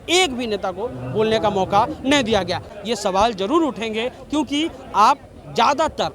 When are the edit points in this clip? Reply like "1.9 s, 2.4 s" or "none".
2.8 s